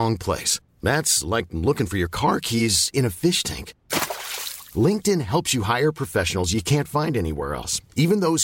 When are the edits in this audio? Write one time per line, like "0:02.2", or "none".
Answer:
none